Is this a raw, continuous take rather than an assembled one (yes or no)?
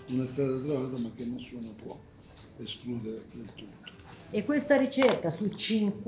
no